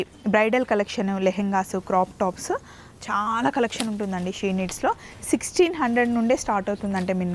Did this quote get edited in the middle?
no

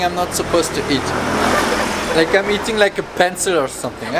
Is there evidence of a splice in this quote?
no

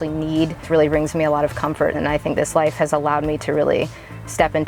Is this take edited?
yes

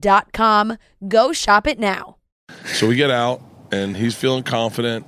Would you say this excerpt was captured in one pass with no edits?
no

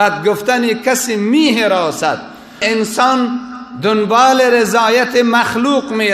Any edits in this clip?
yes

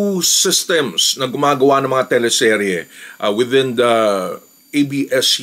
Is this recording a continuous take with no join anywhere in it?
yes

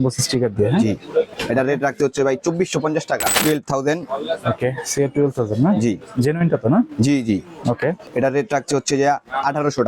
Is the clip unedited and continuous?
no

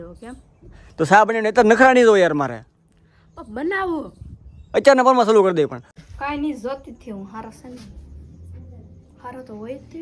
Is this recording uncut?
no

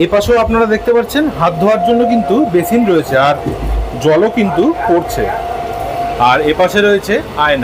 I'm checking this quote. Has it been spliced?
no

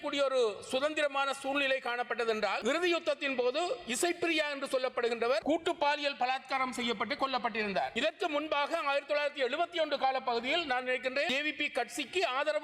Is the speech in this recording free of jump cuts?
no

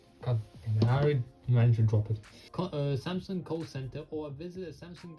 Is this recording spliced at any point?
yes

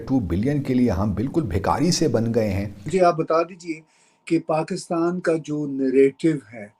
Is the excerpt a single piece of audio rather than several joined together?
no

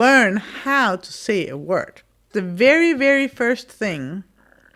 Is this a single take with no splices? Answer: no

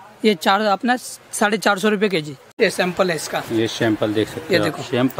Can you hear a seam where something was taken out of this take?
yes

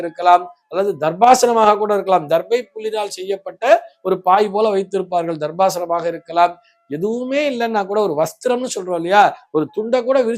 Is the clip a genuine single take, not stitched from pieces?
yes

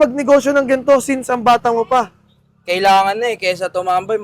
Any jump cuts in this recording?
no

